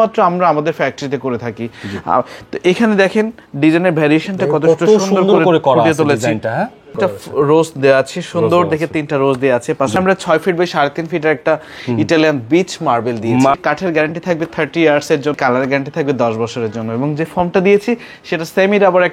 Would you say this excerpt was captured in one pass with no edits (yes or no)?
no